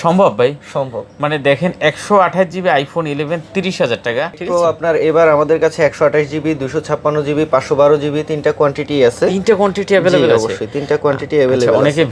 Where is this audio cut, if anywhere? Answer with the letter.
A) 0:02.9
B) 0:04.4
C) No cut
B